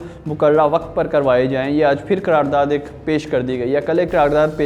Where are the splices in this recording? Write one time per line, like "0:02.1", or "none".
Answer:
none